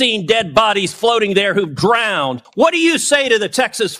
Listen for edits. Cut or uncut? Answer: cut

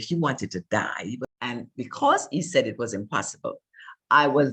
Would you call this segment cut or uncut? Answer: cut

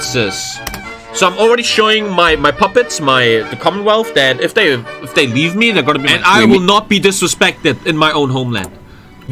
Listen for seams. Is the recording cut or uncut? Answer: cut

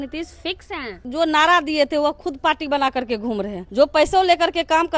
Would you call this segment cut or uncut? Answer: cut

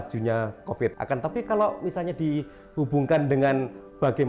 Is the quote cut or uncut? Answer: cut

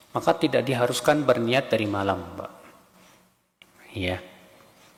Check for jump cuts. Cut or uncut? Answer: uncut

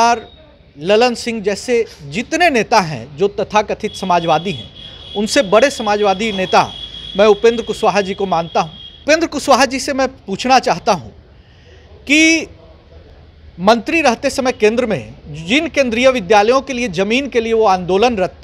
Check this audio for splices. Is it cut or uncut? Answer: cut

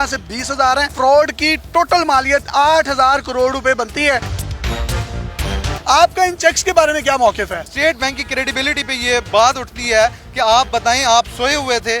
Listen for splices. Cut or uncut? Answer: cut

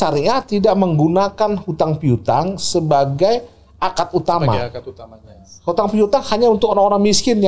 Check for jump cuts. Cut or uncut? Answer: uncut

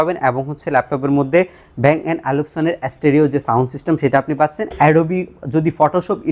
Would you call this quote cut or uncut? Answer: cut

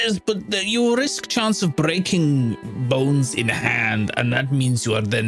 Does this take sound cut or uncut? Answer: uncut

